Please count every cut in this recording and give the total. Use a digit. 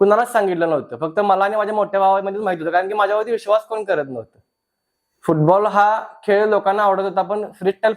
0